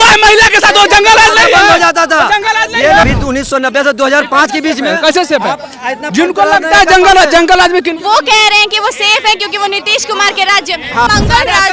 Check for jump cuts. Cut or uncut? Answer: cut